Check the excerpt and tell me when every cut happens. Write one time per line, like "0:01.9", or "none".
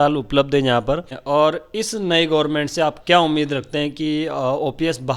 0:01.1